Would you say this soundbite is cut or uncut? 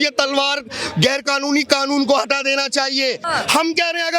cut